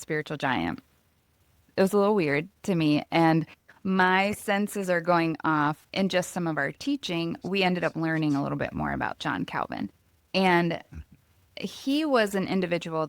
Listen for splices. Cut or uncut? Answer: cut